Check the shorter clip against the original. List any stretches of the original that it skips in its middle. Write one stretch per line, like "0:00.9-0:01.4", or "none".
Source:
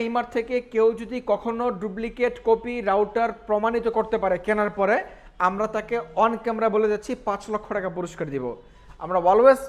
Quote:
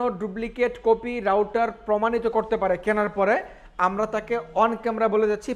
none